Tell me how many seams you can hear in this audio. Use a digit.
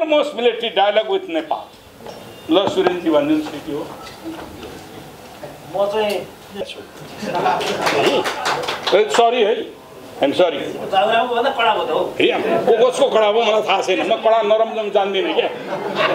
1